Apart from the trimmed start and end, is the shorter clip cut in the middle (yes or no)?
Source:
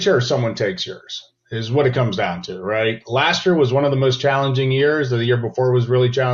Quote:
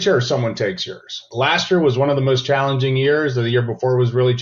yes